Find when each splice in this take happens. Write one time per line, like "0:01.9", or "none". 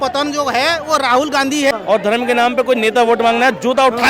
0:01.7